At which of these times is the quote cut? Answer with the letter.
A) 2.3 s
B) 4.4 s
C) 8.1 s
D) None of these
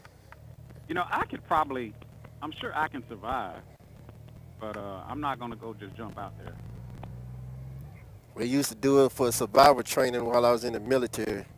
D